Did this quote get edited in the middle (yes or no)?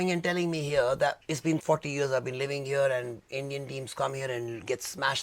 yes